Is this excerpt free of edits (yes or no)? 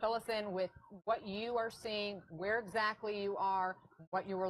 no